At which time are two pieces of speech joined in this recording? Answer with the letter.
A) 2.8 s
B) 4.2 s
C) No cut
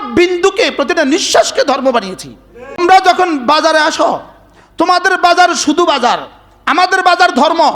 A